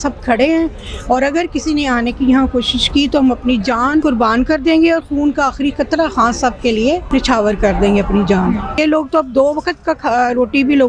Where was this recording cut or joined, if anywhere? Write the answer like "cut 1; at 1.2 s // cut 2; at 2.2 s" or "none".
cut 1; at 4.0 s // cut 2; at 7.0 s // cut 3; at 8.8 s

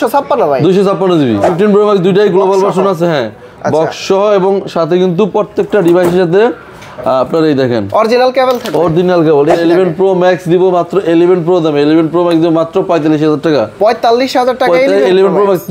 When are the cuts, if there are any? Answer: cut 1; at 1.5 s // cut 2; at 9.6 s

